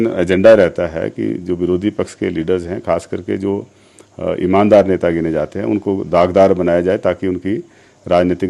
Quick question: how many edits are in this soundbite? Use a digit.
0